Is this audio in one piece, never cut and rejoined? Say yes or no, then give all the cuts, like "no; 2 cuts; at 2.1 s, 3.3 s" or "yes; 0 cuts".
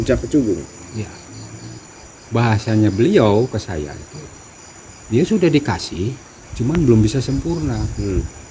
no; 1 cut; at 1.8 s